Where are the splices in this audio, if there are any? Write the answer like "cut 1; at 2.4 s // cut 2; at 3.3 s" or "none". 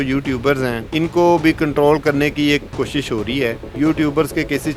cut 1; at 0.8 s // cut 2; at 3.7 s